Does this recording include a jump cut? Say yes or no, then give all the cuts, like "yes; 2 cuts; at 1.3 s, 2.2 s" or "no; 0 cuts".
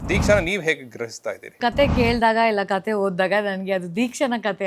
yes; 1 cut; at 1.6 s